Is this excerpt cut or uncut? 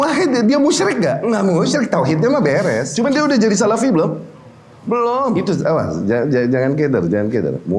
cut